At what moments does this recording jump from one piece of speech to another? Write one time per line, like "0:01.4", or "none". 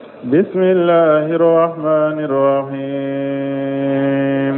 0:01.1